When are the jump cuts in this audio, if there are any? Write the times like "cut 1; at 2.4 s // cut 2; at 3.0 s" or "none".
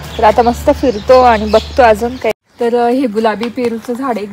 cut 1; at 2.4 s